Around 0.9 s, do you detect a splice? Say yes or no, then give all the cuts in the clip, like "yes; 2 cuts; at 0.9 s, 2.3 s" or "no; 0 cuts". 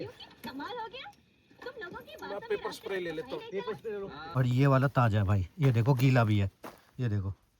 no; 1 cut; at 4.2 s